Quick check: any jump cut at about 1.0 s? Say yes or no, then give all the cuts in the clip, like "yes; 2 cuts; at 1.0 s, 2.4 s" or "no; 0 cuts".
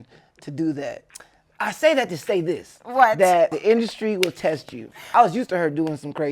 yes; 3 cuts; at 1.0 s, 3.6 s, 5.1 s